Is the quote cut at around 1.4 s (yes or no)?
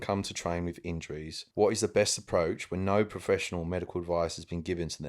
yes